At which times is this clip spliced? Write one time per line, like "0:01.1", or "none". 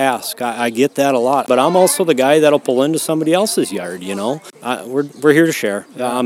0:01.5
0:04.5